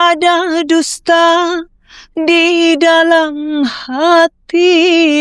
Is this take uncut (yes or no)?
yes